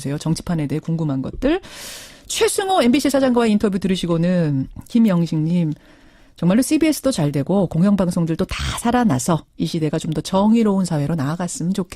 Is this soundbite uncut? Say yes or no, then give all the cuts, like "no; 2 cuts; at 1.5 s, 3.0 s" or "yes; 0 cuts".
yes; 0 cuts